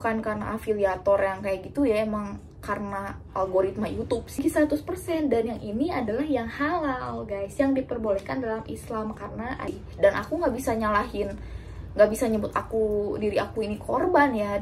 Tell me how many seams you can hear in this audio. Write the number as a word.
two